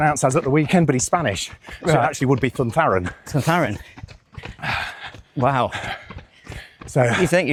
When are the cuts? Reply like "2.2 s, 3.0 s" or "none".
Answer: none